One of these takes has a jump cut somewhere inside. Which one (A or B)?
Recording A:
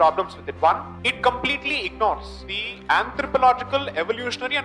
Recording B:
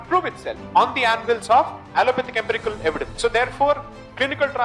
B